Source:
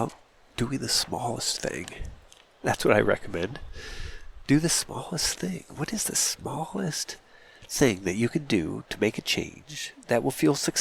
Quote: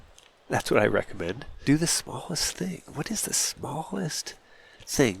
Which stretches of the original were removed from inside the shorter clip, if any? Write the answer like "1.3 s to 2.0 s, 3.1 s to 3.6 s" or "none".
3.6 s to 4.3 s